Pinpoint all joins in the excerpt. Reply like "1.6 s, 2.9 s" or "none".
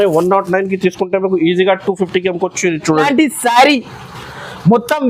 3.1 s